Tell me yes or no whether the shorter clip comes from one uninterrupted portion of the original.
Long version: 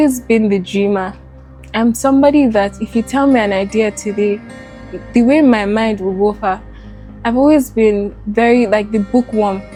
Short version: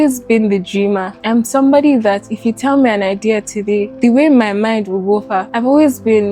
no